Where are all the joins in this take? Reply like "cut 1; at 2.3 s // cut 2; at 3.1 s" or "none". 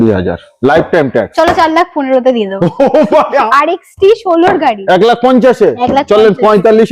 cut 1; at 3.4 s